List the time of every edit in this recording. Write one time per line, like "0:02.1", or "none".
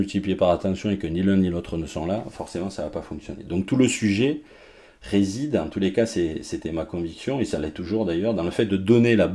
none